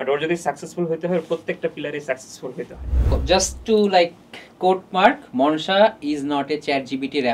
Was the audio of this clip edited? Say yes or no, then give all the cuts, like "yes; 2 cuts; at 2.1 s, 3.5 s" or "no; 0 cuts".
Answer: yes; 1 cut; at 3.1 s